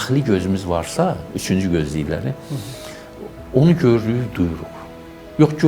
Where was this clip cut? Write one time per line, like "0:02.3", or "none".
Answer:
none